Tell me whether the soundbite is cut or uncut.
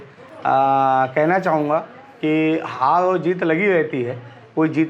uncut